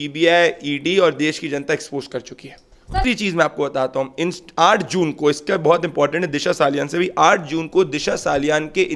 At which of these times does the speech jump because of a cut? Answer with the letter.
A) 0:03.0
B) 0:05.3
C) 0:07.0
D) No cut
A